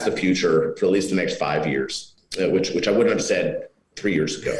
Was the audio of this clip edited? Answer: no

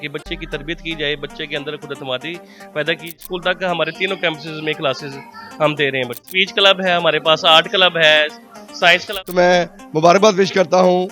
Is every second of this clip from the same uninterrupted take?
no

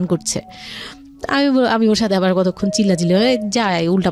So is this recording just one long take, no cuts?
yes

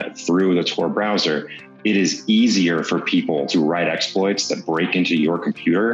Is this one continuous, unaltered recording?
yes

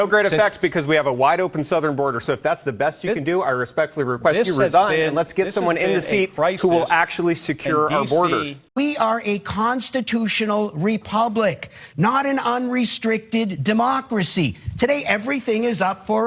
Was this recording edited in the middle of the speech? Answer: yes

